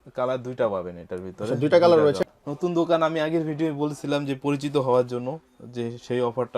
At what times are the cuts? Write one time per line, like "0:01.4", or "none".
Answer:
0:02.2